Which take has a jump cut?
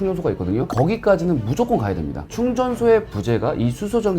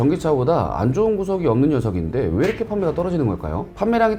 first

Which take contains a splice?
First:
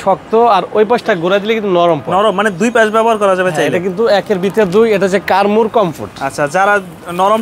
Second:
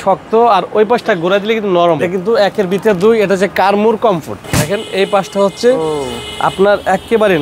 second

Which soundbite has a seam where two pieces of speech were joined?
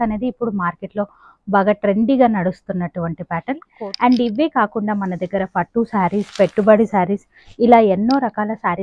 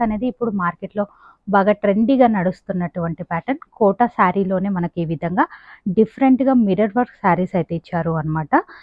first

